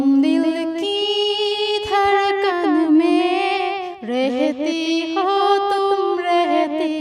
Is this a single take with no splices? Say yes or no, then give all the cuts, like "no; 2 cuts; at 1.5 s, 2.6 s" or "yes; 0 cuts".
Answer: yes; 0 cuts